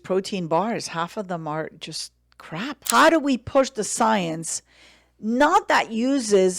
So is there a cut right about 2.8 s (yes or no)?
yes